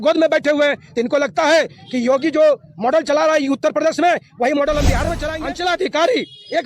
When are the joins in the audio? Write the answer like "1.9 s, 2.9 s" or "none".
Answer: 5.0 s